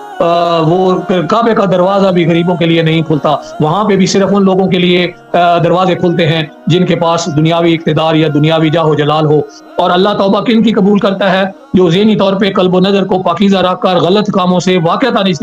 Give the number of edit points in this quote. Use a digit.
1